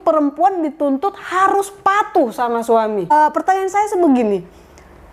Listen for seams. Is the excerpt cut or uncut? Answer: cut